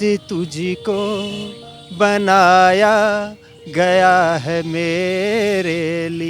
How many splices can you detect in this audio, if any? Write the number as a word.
zero